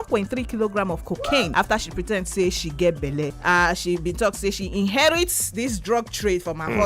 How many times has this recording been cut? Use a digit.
2